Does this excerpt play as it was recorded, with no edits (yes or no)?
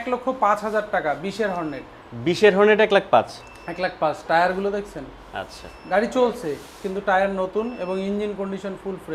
yes